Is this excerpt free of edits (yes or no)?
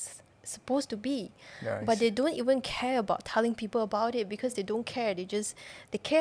yes